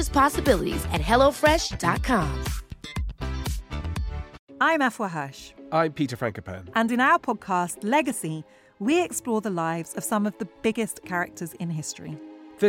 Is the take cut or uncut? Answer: cut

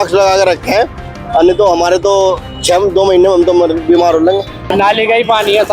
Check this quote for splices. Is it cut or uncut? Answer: cut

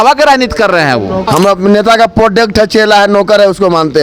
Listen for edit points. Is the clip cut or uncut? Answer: cut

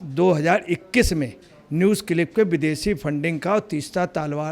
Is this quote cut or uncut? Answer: uncut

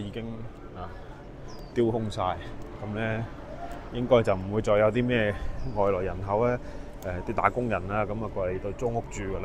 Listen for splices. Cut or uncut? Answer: uncut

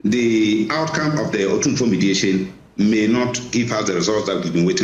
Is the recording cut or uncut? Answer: uncut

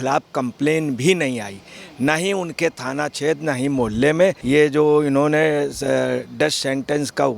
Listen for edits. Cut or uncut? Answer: cut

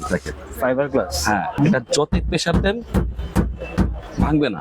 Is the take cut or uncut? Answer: cut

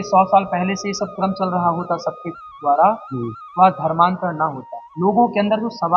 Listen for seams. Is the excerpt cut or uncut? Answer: uncut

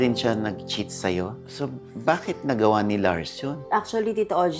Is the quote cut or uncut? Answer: cut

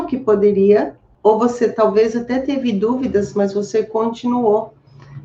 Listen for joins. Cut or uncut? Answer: cut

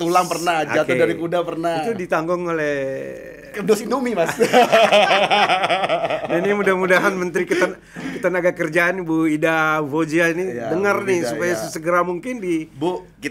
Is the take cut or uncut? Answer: uncut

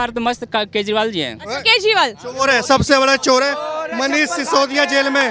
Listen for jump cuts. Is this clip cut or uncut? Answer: uncut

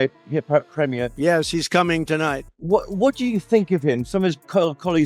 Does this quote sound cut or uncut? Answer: uncut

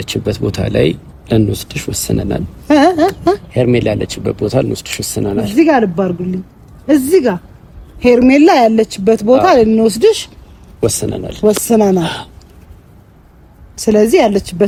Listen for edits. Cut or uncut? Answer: uncut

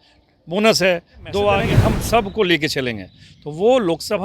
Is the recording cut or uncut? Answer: cut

